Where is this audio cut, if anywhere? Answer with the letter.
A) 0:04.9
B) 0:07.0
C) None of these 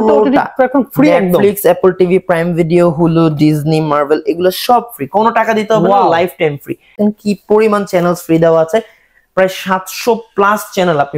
B